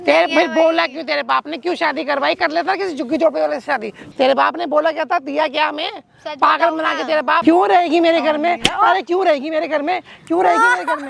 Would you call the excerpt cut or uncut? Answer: cut